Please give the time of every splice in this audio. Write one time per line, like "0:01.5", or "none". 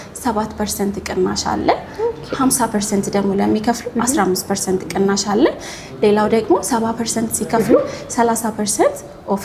none